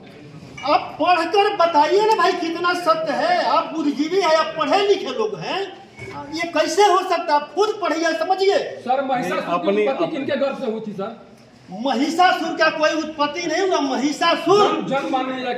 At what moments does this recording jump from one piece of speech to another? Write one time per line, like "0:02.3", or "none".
none